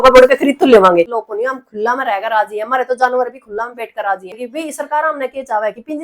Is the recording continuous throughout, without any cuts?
no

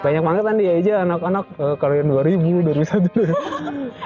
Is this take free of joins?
no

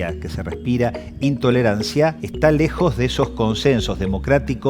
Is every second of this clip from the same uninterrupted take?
no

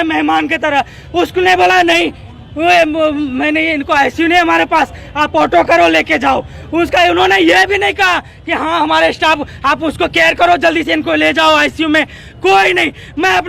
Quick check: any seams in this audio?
no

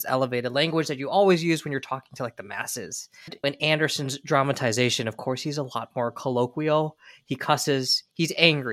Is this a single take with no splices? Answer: no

